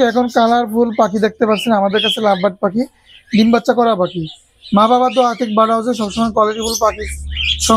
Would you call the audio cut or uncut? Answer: uncut